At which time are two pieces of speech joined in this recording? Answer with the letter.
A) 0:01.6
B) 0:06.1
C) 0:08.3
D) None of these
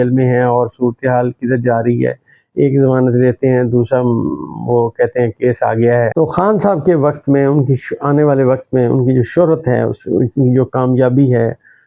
B